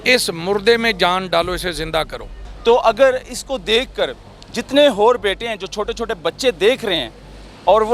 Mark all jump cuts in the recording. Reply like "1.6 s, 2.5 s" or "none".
2.4 s